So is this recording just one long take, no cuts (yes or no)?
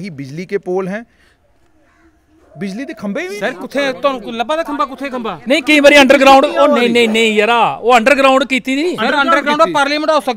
yes